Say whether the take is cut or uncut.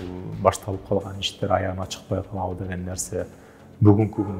uncut